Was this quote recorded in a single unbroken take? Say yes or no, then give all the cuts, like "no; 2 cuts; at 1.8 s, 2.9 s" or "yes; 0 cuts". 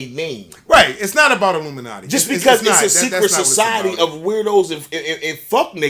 yes; 0 cuts